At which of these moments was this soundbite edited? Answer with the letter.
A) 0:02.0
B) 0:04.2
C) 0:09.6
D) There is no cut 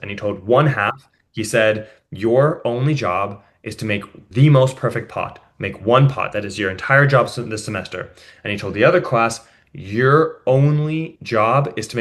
B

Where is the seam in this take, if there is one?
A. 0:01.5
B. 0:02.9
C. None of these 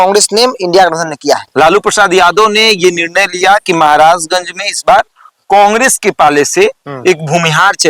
A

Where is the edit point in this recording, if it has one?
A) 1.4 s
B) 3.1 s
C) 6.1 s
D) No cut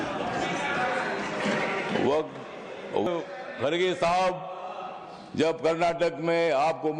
B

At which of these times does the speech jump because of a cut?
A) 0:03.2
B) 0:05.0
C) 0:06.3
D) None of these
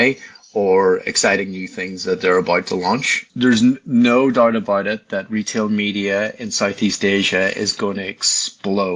A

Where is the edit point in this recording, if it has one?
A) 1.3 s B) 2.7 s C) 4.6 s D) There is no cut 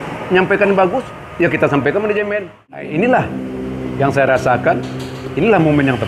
B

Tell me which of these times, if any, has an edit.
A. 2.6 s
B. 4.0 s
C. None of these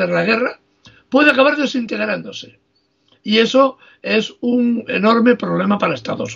C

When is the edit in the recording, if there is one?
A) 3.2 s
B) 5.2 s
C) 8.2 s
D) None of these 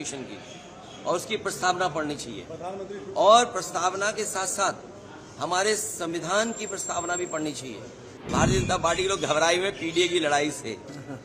C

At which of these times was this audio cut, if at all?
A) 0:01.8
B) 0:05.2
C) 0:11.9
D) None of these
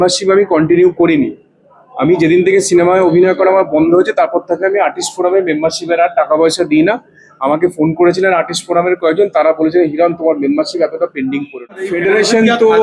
C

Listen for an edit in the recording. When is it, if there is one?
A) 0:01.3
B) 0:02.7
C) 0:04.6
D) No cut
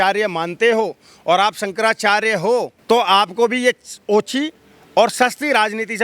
B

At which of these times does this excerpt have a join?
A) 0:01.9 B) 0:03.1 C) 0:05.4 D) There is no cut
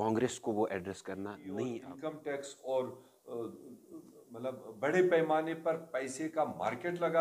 A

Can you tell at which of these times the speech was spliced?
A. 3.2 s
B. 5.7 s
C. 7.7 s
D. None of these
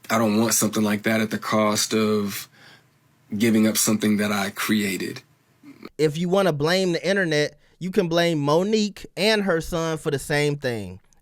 B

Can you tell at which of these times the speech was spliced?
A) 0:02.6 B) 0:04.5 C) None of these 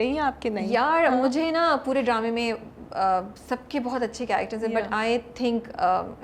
C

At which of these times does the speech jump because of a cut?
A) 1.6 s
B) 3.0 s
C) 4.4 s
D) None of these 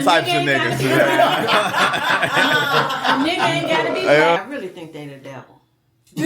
C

